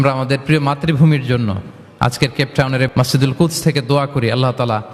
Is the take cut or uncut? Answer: cut